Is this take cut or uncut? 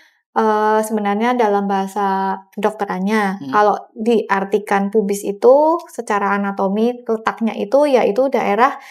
uncut